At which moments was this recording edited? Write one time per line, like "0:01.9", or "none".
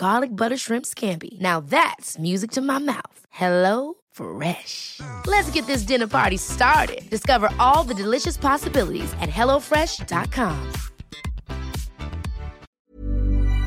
0:12.6